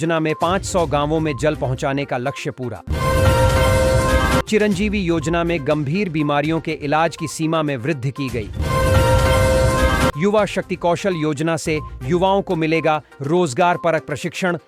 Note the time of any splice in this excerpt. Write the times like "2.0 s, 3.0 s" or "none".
none